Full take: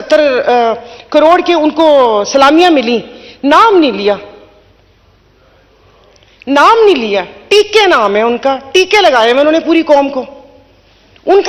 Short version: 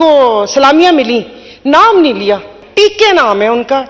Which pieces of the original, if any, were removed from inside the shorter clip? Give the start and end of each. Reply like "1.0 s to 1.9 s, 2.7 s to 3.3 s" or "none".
4.4 s to 7.3 s